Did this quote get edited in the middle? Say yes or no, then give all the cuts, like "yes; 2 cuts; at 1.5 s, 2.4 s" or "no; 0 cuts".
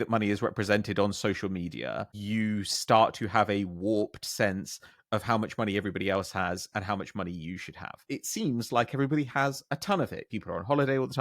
yes; 3 cuts; at 2.1 s, 8.1 s, 10.2 s